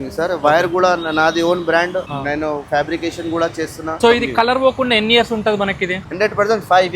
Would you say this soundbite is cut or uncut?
cut